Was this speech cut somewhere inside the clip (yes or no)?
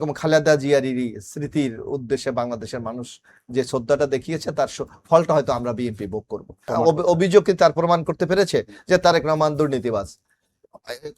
yes